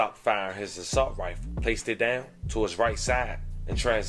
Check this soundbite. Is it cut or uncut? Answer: uncut